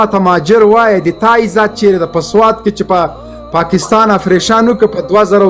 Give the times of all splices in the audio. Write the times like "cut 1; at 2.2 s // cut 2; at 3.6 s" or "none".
none